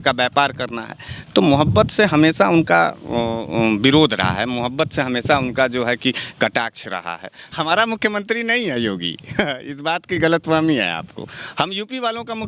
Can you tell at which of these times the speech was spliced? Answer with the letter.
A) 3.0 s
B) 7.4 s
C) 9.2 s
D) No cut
B